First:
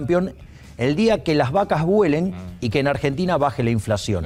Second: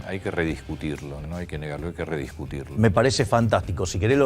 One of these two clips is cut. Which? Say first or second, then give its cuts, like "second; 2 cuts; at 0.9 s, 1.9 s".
second; 1 cut; at 1.2 s